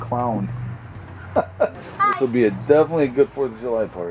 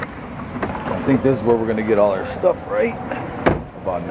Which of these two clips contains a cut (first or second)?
first